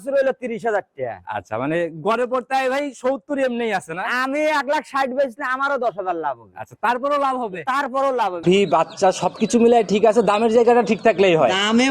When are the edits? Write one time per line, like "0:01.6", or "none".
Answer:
0:08.4